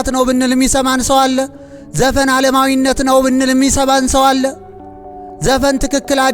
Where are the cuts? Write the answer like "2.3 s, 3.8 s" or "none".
none